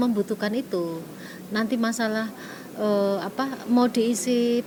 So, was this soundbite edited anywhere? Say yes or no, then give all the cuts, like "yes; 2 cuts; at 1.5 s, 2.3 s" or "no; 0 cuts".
no; 0 cuts